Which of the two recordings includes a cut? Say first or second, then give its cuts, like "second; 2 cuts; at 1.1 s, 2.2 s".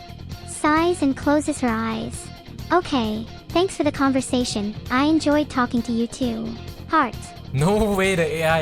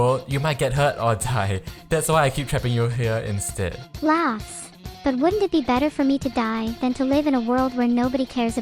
second; 1 cut; at 3.8 s